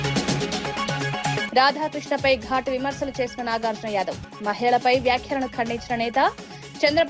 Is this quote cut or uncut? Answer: cut